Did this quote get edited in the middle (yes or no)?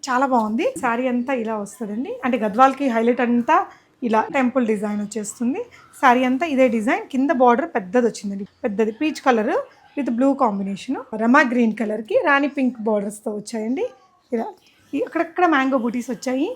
yes